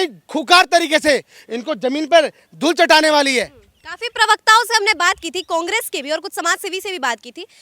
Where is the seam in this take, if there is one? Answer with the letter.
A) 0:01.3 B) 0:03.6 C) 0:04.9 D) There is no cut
D